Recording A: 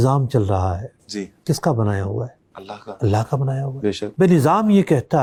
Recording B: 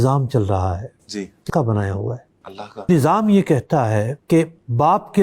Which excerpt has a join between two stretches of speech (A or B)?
B